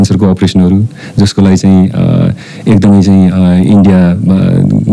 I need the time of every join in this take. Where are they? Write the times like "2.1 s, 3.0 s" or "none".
none